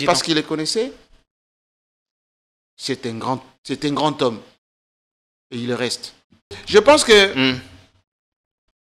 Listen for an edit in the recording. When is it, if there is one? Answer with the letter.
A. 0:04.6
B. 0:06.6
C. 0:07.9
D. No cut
B